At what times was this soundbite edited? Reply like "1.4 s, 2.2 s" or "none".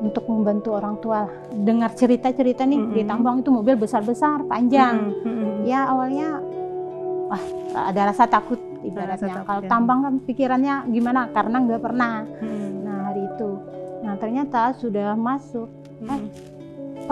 1.4 s